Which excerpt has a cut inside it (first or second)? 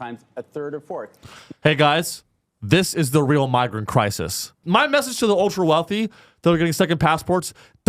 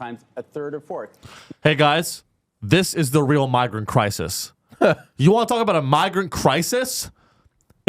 first